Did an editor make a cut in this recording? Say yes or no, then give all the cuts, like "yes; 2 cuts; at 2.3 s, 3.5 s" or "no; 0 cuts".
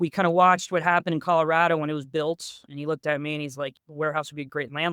yes; 2 cuts; at 2.6 s, 3.8 s